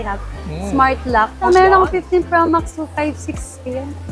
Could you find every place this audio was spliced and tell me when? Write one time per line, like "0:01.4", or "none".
0:01.5